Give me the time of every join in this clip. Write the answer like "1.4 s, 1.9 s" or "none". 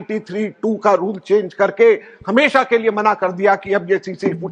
none